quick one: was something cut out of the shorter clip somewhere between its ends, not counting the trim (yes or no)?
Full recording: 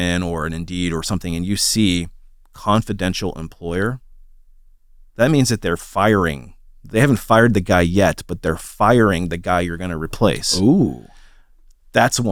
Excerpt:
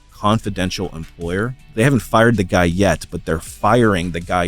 yes